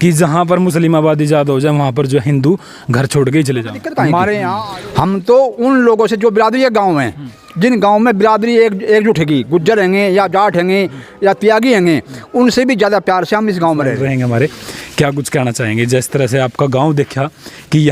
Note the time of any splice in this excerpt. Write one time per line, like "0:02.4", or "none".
0:04.6
0:14.0